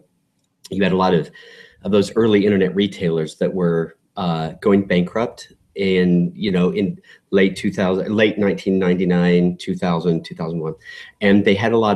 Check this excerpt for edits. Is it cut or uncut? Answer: uncut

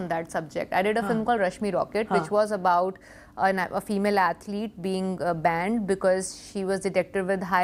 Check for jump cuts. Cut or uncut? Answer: uncut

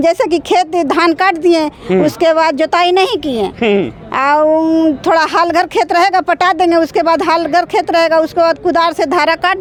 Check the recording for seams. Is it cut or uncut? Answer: uncut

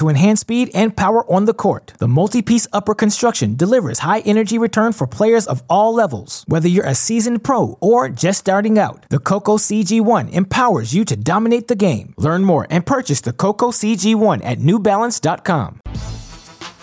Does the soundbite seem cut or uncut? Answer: cut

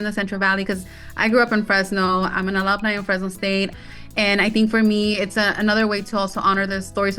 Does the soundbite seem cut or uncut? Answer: cut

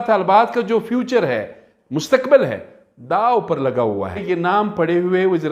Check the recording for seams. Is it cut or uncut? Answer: cut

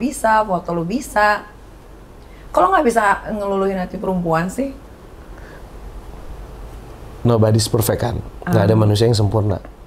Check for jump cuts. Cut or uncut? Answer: uncut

